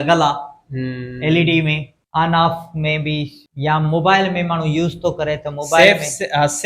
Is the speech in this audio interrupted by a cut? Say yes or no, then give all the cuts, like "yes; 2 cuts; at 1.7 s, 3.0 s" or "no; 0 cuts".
yes; 2 cuts; at 1.9 s, 3.4 s